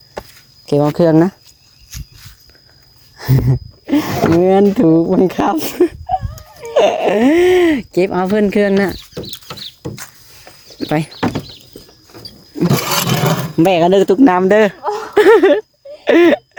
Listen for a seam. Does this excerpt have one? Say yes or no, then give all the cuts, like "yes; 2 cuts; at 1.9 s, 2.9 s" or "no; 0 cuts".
no; 0 cuts